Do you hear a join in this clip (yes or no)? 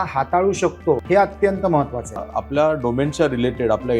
yes